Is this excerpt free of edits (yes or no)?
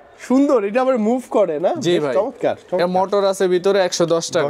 yes